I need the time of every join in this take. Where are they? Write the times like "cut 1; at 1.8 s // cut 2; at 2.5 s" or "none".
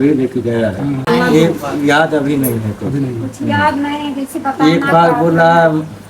cut 1; at 1.0 s